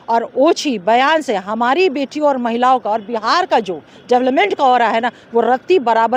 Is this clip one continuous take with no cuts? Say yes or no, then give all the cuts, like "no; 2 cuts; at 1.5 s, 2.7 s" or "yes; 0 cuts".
yes; 0 cuts